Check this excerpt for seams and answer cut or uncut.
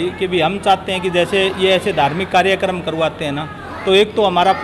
uncut